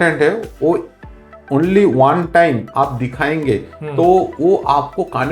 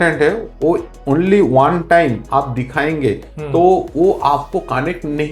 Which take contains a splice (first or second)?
second